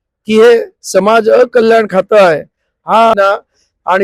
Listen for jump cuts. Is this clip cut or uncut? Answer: cut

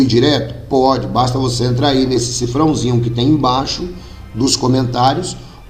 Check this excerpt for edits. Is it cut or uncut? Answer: uncut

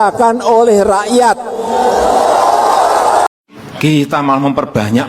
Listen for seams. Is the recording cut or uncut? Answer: cut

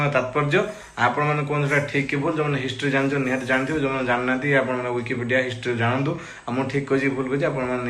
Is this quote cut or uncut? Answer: uncut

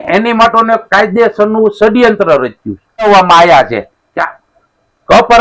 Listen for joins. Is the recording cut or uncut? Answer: cut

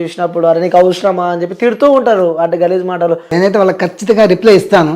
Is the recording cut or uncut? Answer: cut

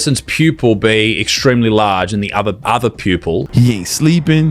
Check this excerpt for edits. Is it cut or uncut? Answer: cut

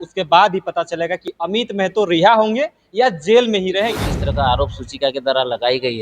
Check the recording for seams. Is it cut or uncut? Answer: cut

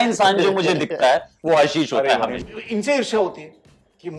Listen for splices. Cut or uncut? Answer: cut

